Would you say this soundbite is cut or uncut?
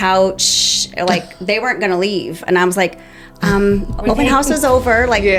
uncut